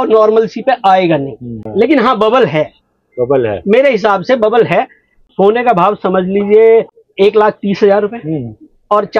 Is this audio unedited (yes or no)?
no